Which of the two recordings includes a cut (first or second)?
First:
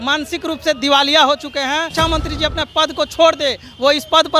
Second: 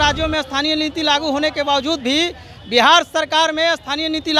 first